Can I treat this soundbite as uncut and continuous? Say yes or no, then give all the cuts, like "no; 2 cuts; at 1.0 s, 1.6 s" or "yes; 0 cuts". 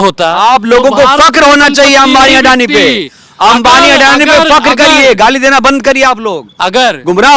yes; 0 cuts